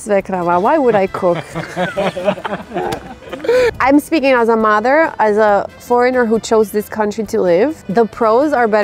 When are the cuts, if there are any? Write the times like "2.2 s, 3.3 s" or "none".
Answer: 3.7 s, 7.8 s